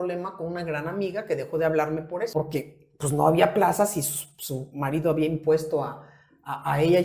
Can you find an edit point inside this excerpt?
yes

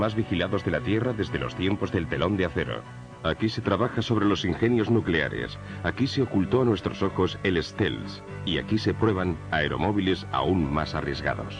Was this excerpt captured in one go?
no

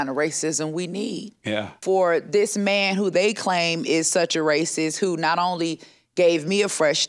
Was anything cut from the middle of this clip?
yes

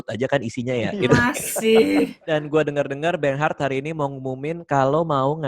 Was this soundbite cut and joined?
yes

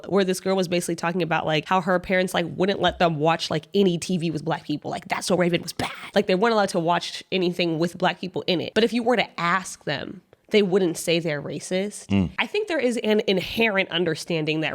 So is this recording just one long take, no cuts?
no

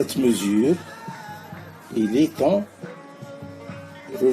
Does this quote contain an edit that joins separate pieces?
no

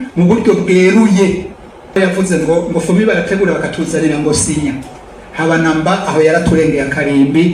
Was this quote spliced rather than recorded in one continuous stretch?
yes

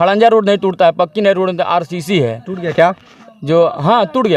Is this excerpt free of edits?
yes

